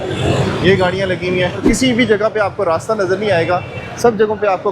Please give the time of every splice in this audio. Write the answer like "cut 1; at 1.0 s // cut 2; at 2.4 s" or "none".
cut 1; at 1.6 s